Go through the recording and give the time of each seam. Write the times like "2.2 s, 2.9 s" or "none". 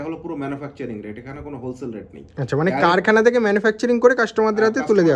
none

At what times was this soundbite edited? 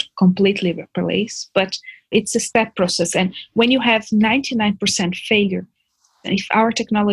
2.1 s

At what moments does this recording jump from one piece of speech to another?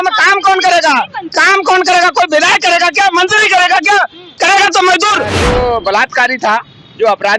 5.3 s

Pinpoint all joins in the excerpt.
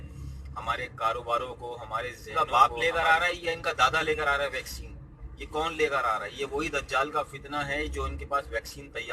2.2 s

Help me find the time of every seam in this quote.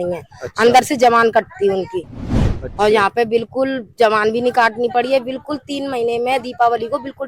2.3 s

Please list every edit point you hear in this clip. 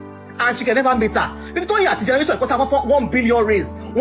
none

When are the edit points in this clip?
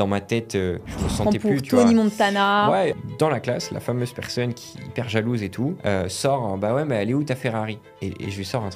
2.9 s, 5.8 s

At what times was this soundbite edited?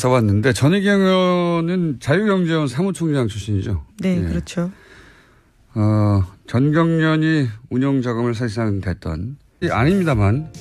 none

